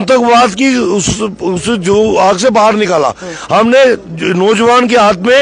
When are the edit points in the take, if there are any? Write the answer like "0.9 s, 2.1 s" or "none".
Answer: none

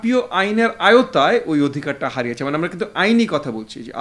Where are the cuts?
none

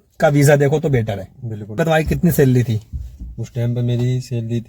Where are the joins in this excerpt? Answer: 1.8 s

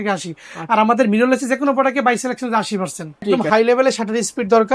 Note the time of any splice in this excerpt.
3.4 s

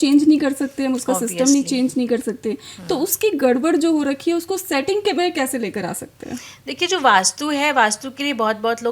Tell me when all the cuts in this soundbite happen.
none

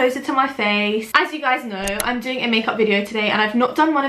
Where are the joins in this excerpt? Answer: 1.1 s

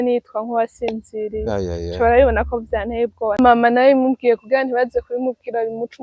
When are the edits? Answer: 3.4 s

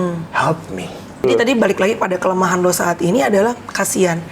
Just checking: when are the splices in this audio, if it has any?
1.2 s

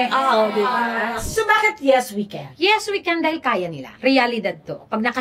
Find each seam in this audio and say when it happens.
1.2 s, 2.4 s, 4.0 s

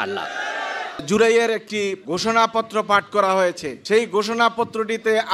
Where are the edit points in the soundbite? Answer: 1.0 s, 2.0 s, 3.7 s

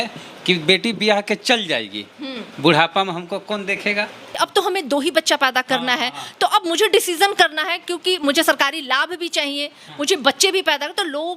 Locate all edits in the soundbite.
4.2 s

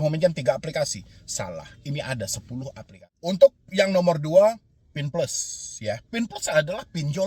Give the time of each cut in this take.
2.9 s

